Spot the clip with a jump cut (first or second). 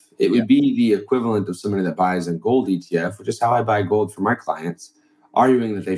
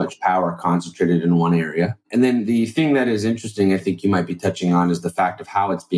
second